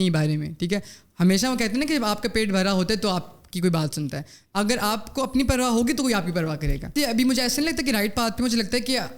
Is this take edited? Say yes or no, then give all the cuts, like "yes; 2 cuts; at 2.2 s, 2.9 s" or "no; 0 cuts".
yes; 1 cut; at 6.9 s